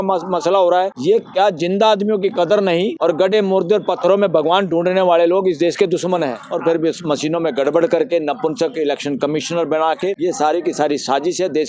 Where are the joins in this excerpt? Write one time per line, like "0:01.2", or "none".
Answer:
0:00.9
0:02.9
0:06.4
0:10.2